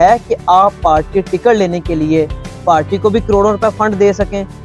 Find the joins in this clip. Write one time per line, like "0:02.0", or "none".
none